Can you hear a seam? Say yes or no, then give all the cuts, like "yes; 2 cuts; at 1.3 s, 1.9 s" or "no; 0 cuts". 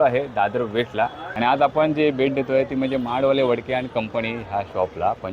yes; 1 cut; at 1.2 s